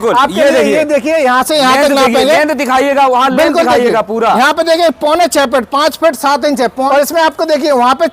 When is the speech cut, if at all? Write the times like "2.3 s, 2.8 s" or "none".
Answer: 6.9 s